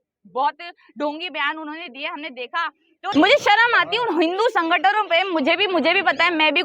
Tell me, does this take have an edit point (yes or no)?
yes